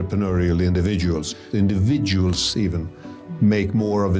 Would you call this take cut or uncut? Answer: cut